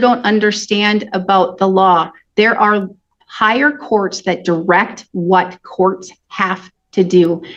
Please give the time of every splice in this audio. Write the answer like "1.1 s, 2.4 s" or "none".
none